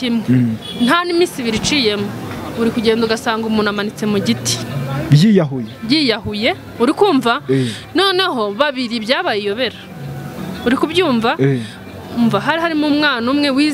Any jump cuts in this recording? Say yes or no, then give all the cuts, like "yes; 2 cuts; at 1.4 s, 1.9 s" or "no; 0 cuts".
no; 0 cuts